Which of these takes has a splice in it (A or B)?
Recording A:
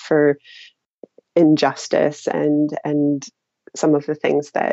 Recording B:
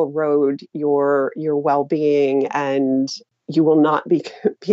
B